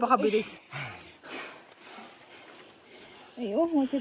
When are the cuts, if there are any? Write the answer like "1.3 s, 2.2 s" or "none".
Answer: none